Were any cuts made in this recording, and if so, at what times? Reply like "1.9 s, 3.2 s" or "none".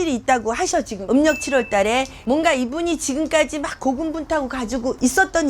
1.0 s